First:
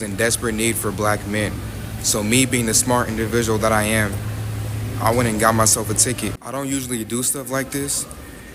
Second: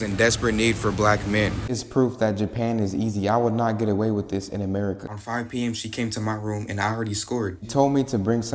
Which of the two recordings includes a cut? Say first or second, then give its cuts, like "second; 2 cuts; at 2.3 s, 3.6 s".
second; 3 cuts; at 1.7 s, 5.1 s, 7.7 s